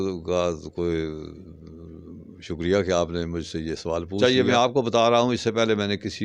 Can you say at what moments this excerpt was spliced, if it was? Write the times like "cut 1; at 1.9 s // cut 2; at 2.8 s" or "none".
cut 1; at 4.2 s